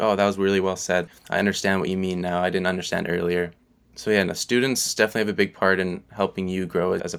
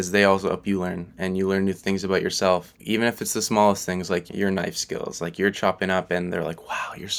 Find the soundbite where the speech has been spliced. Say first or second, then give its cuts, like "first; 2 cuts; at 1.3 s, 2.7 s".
first; 2 cuts; at 1.1 s, 4.9 s